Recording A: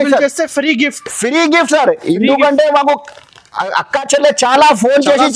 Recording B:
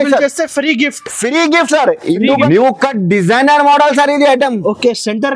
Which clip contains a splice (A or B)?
B